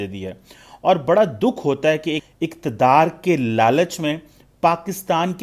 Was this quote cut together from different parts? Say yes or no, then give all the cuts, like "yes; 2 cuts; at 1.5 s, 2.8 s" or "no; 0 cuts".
yes; 1 cut; at 2.2 s